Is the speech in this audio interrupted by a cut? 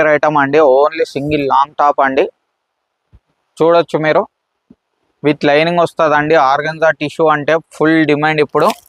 no; 0 cuts

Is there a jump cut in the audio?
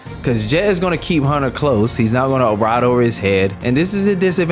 yes; 1 cut; at 3.6 s

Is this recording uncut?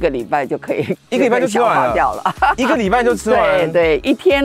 yes; 0 cuts

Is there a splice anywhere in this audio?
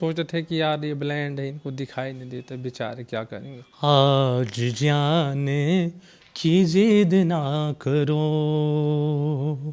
yes; 1 cut; at 3.6 s

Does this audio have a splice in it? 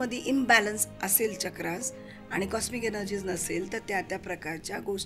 no; 0 cuts

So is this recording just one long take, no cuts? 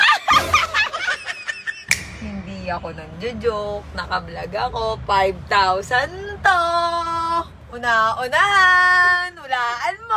no; 1 cut; at 1.7 s

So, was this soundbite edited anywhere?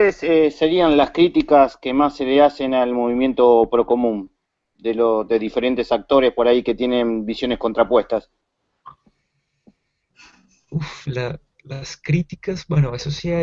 yes; 1 cut; at 6.0 s

